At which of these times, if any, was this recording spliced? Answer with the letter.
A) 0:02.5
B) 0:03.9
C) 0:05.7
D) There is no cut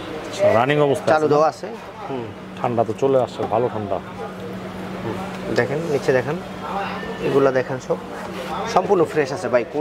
D